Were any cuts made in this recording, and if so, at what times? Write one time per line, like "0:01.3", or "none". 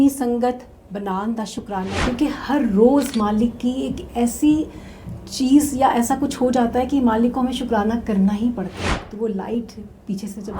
0:02.0
0:08.8